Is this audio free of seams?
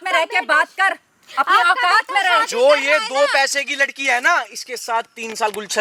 yes; 0 cuts

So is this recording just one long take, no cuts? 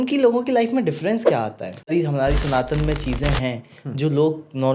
no; 1 cut; at 1.9 s

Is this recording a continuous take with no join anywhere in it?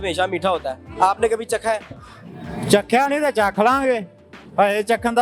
yes; 0 cuts

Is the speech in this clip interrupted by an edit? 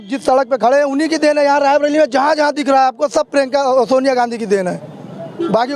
no; 0 cuts

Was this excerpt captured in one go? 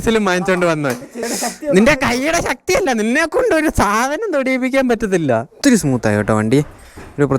no; 2 cuts; at 1.2 s, 5.5 s

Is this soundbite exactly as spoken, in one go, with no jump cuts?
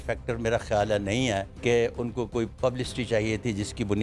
no; 1 cut; at 1.5 s

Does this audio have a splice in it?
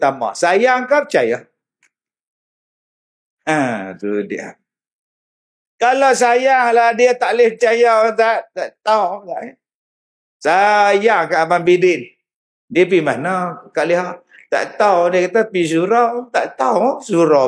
no; 0 cuts

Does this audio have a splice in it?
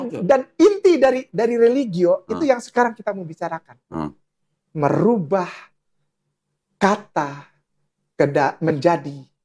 no; 0 cuts

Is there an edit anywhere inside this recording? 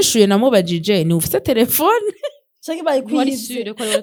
no; 0 cuts

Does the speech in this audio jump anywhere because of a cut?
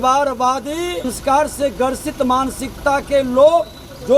yes; 1 cut; at 1.1 s

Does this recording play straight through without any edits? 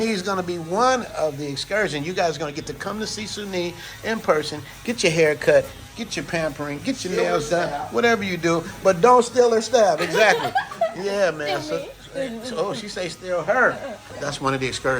no; 1 cut; at 14.0 s

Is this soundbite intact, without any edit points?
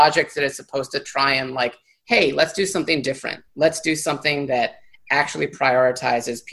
yes; 0 cuts

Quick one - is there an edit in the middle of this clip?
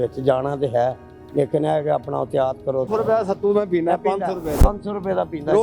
yes; 1 cut; at 2.9 s

